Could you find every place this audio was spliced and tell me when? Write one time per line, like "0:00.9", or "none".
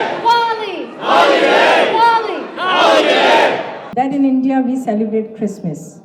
0:03.8